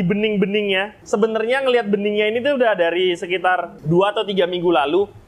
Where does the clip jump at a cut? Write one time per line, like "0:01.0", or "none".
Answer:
0:00.9